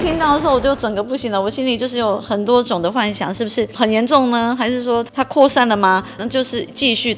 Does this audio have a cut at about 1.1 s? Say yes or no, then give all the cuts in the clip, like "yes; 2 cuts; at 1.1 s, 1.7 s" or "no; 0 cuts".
no; 3 cuts; at 3.7 s, 5.1 s, 6.2 s